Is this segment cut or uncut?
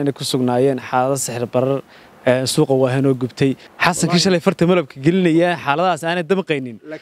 cut